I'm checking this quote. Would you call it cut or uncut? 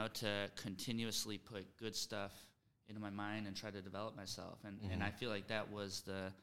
uncut